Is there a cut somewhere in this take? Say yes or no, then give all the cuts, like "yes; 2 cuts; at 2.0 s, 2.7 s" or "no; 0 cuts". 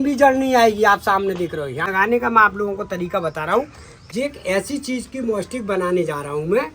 yes; 2 cuts; at 1.9 s, 3.9 s